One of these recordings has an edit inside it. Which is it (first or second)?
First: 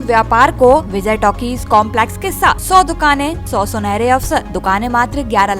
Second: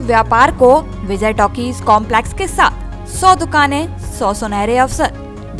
first